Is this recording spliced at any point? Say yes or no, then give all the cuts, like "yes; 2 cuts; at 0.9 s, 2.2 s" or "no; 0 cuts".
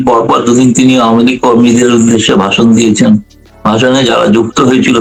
no; 0 cuts